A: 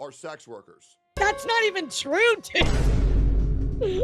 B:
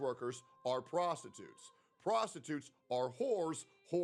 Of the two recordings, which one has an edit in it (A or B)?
A